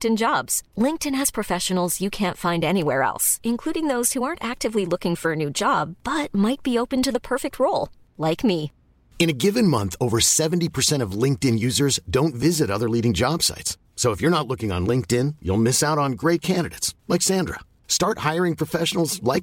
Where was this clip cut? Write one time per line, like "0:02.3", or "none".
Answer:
none

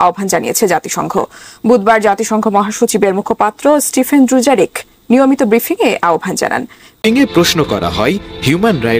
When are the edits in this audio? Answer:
0:07.0

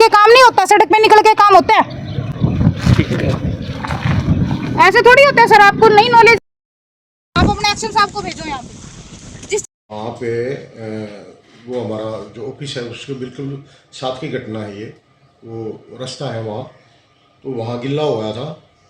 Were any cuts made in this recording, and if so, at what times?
none

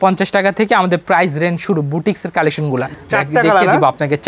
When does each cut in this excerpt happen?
0:02.9

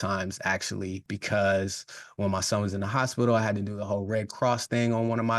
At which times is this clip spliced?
0:01.1

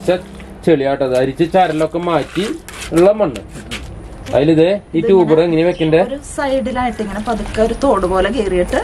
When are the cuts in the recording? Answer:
none

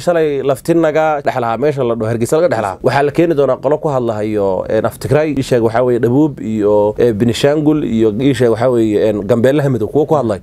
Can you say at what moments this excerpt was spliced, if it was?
0:01.2
0:02.7
0:05.4
0:06.9

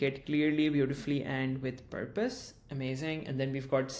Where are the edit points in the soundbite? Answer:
none

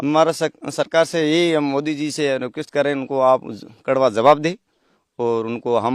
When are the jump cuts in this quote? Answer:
none

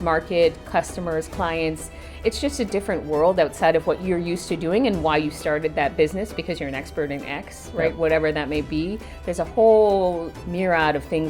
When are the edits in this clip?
0:10.4

